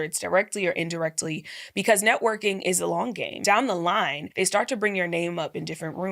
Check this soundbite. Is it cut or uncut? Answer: cut